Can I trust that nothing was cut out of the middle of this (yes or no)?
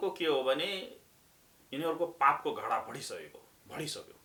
yes